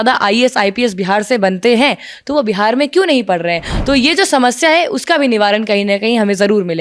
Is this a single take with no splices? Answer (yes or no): yes